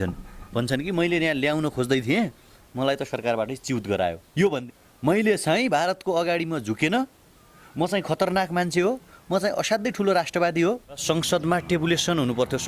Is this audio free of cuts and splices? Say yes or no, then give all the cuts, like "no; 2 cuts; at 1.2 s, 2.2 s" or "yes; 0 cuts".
no; 2 cuts; at 4.6 s, 11.0 s